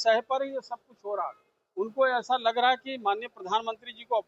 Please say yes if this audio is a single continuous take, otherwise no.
yes